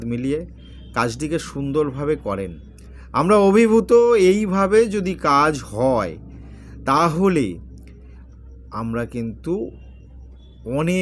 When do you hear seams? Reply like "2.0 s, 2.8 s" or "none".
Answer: none

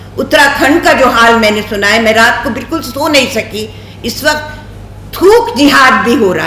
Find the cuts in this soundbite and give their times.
none

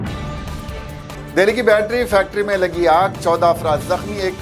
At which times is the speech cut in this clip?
1.1 s

